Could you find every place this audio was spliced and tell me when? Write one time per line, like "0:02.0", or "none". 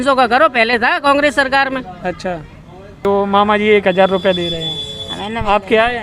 0:03.0